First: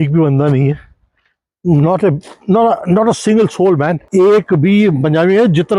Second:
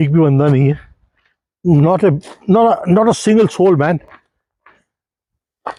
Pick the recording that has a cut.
first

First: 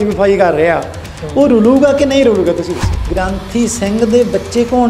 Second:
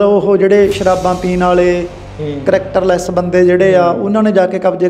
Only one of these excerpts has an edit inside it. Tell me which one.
first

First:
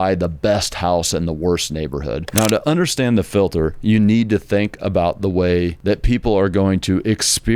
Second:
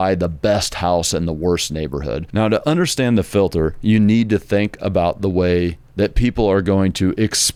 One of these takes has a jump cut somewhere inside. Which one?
first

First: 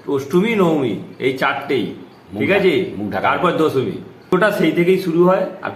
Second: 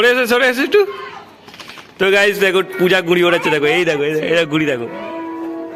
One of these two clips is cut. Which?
first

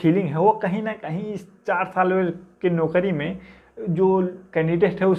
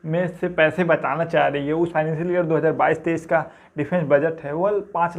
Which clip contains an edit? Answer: second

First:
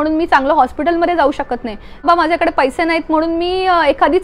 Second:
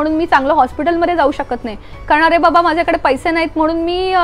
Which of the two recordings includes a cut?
first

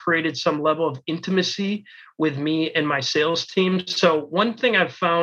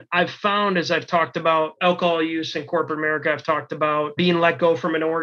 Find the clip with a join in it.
second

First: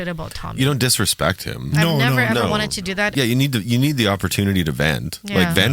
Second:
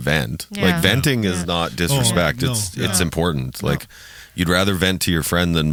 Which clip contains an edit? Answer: first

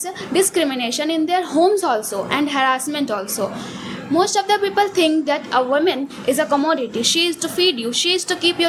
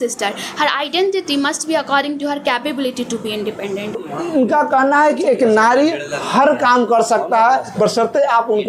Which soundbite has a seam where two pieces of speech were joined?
second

